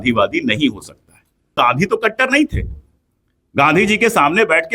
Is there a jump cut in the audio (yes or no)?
yes